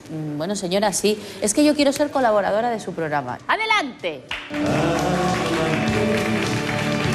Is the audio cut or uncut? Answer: cut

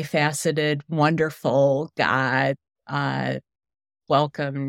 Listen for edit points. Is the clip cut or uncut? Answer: uncut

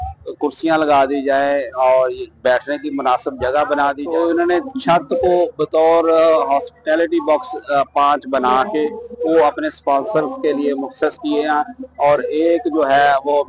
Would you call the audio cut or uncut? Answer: cut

